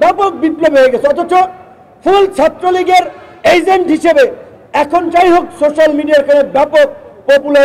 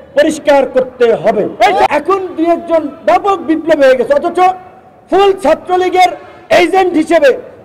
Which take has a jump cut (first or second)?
second